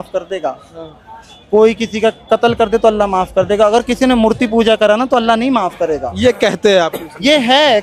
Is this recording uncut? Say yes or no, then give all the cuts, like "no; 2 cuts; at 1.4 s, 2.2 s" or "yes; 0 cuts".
yes; 0 cuts